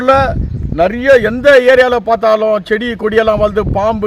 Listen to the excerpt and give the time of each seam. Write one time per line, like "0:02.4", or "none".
none